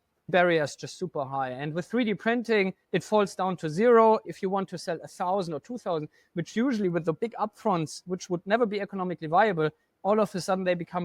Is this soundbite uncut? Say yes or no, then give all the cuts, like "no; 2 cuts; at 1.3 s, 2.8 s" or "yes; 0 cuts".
no; 1 cut; at 4.3 s